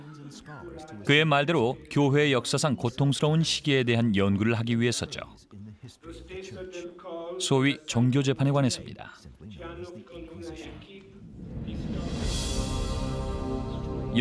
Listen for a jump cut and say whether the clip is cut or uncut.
uncut